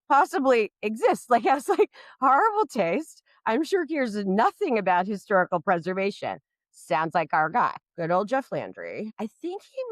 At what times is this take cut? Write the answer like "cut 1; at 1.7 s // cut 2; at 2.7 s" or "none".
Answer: cut 1; at 7.9 s // cut 2; at 9.1 s